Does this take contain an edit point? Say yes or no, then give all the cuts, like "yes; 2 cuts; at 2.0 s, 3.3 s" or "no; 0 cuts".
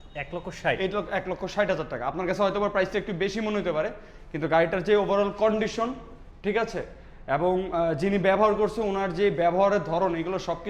no; 0 cuts